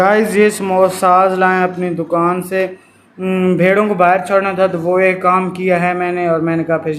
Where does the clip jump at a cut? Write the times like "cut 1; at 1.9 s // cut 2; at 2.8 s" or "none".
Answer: none